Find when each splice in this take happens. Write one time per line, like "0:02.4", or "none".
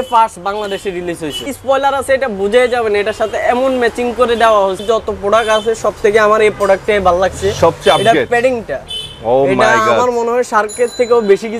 0:01.4
0:04.8